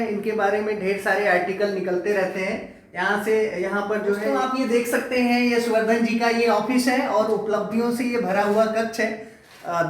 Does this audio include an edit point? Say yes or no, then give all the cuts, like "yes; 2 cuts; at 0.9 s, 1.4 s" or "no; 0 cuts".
yes; 1 cut; at 4.4 s